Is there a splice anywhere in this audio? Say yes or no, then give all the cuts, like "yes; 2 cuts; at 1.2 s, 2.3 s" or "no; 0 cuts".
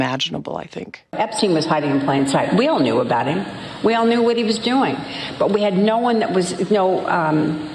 yes; 1 cut; at 1.1 s